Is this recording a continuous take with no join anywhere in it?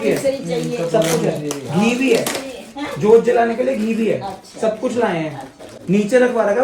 yes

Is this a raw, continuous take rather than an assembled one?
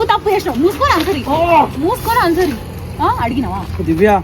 yes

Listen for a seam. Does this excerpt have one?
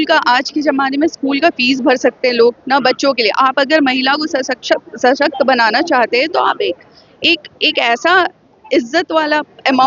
no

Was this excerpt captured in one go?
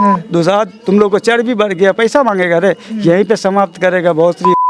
yes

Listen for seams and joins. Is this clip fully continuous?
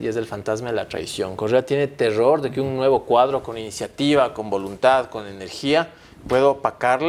yes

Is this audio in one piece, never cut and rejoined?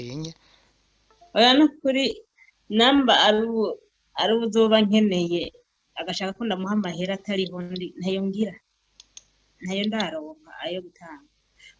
yes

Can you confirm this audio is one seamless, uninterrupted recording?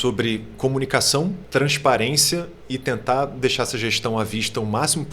no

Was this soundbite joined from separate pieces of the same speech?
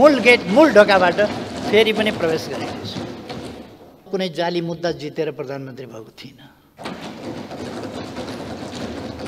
yes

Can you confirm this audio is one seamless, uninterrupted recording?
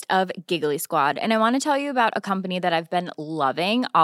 yes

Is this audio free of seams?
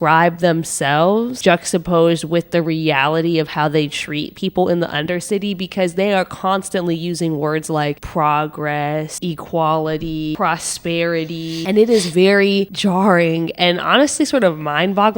no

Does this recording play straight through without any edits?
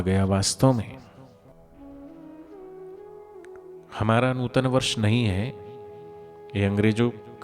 no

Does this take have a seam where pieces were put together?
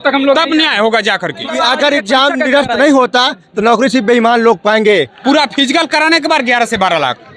yes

